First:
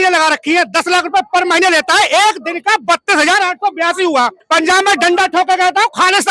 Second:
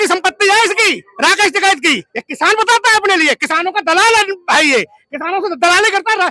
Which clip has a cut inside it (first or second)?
first